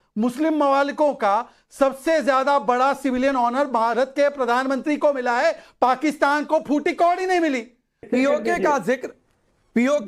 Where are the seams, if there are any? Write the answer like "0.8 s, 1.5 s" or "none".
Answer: 8.0 s